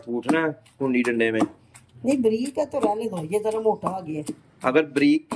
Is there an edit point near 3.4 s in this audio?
no; 0 cuts

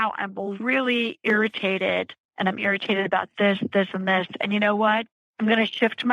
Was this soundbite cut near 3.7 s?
no; 2 cuts; at 2.2 s, 5.2 s

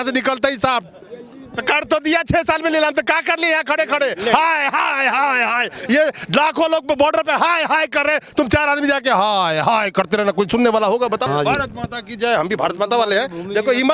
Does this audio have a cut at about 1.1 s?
yes; 2 cuts; at 1.1 s, 11.3 s

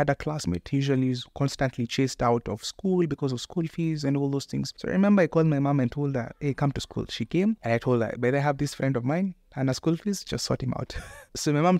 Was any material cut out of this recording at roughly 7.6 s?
yes; 2 cuts; at 4.7 s, 7.6 s

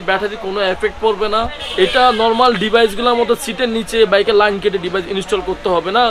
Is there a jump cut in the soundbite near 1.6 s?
yes; 1 cut; at 1.6 s

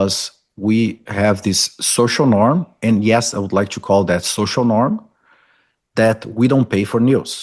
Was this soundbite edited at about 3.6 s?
no; 0 cuts

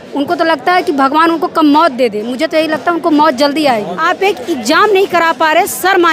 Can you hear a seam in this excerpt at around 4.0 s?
yes; 1 cut; at 4.0 s

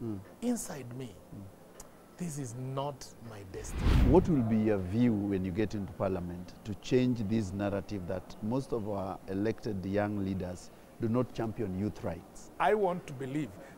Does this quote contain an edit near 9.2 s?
no; 2 cuts; at 3.8 s, 12.5 s

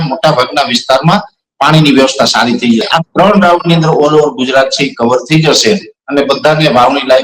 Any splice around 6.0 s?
no; 1 cut; at 2.9 s

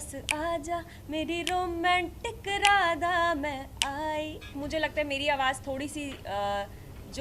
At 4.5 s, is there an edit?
yes; 1 cut; at 4.5 s

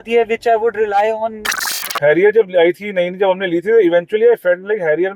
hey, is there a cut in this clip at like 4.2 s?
no; 1 cut; at 1.8 s

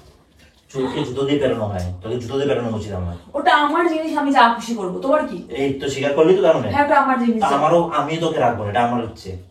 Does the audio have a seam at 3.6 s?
no; 0 cuts

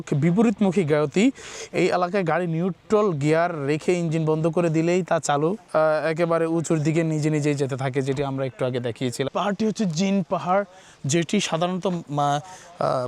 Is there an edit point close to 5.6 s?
yes; 2 cuts; at 5.6 s, 9.3 s

